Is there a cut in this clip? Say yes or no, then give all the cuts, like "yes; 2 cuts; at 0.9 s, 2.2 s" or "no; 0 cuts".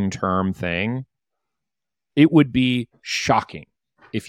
no; 0 cuts